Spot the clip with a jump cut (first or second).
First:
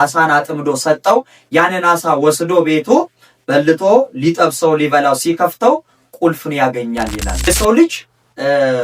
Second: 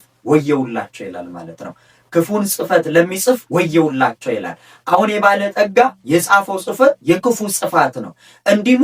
first